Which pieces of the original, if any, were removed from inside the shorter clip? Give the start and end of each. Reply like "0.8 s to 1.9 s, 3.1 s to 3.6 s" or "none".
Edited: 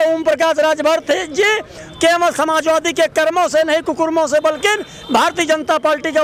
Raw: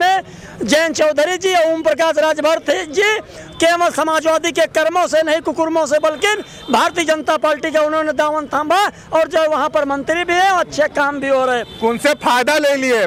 none